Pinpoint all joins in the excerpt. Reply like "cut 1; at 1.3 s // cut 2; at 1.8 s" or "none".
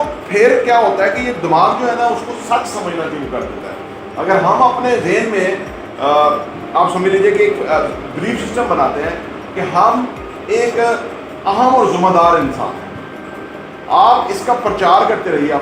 none

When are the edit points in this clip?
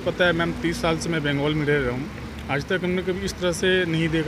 none

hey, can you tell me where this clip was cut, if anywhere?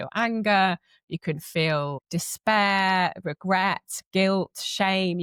none

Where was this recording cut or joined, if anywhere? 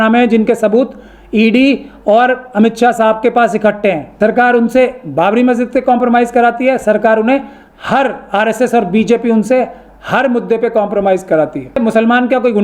cut 1; at 4.1 s // cut 2; at 11.8 s

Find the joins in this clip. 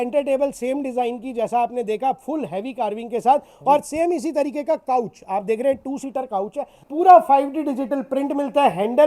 cut 1; at 6.8 s

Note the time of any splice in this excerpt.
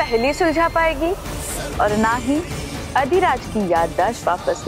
none

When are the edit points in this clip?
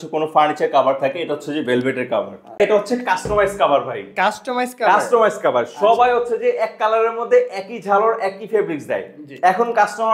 cut 1; at 2.6 s

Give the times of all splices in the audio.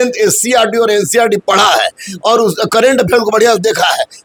none

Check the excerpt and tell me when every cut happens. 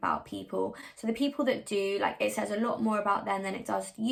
none

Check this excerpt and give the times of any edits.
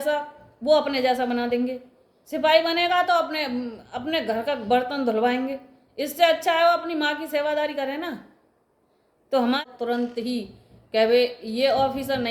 cut 1; at 9.6 s

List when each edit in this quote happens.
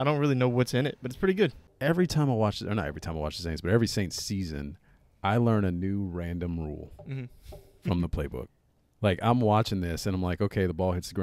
cut 1; at 1.7 s

